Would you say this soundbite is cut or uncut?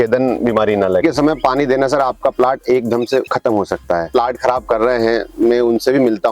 cut